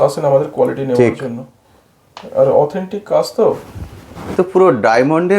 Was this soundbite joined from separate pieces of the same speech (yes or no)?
yes